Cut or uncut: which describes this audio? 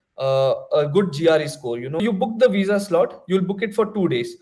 cut